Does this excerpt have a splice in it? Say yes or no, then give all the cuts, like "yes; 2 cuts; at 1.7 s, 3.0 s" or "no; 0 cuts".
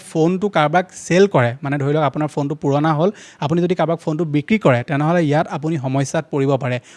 no; 0 cuts